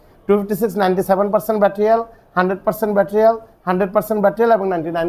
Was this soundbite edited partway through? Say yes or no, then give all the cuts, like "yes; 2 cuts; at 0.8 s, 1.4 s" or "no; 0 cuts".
no; 0 cuts